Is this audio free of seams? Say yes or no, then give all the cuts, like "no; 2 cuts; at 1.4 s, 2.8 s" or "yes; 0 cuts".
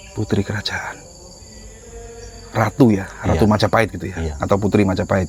yes; 0 cuts